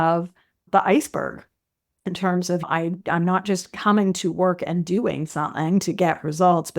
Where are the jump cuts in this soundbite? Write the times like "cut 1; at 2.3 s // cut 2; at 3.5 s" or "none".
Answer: cut 1; at 2.6 s